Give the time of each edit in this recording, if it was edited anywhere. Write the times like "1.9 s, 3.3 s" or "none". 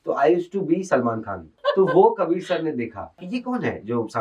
1.5 s, 3.2 s